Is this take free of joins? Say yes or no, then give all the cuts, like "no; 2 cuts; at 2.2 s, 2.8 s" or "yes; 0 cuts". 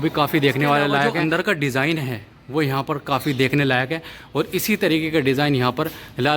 no; 1 cut; at 1.1 s